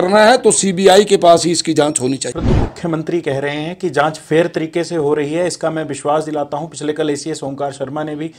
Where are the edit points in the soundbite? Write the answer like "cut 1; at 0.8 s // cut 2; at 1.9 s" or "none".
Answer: cut 1; at 2.4 s